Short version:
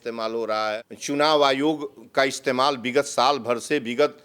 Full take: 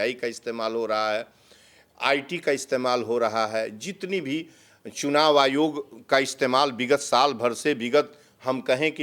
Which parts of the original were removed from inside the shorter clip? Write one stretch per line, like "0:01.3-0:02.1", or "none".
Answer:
0:01.3-0:04.9

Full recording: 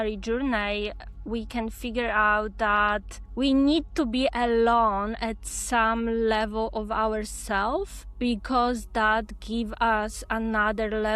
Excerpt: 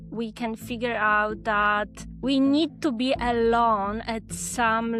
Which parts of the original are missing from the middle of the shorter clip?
none

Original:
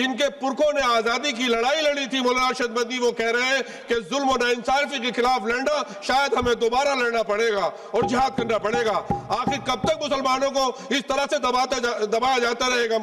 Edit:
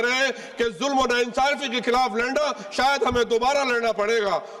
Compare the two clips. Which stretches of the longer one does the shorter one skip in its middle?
none

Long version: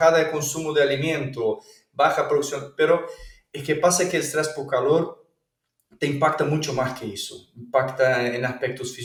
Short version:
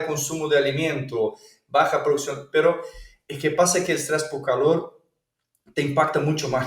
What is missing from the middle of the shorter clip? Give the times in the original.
none

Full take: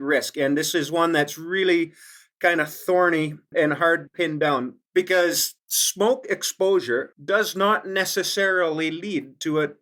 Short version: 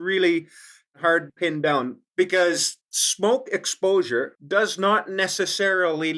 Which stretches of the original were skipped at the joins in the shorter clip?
0:02.4-0:03.7

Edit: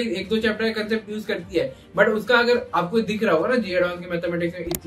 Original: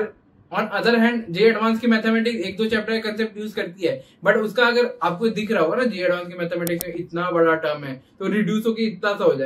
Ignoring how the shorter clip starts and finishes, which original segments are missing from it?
none

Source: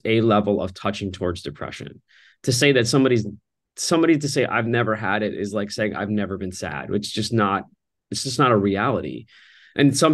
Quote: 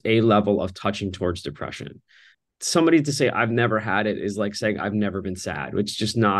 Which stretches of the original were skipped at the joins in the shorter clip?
0:02.2-0:03.4

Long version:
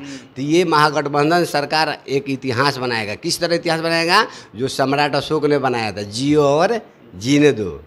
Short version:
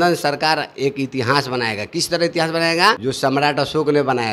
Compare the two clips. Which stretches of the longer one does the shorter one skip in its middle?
0:04.3-0:04.6

